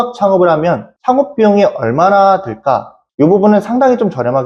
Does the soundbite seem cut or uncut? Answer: uncut